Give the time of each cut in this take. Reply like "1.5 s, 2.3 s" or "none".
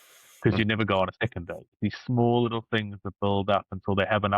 1.8 s